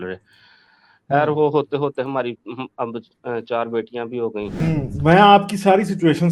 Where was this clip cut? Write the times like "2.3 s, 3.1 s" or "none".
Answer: 4.6 s